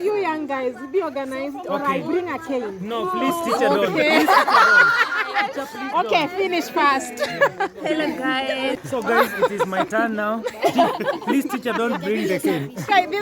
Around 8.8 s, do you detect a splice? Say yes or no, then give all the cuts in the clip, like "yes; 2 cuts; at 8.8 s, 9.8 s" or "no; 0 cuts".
yes; 1 cut; at 8.8 s